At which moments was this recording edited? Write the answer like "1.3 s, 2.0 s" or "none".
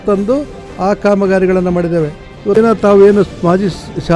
2.5 s